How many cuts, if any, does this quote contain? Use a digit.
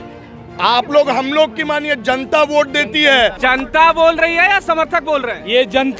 1